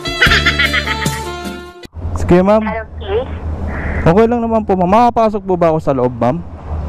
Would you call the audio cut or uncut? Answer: cut